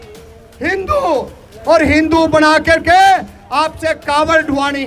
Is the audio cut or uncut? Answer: uncut